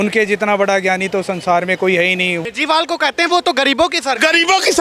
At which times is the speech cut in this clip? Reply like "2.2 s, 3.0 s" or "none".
2.4 s